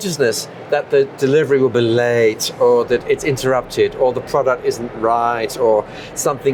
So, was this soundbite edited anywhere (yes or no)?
no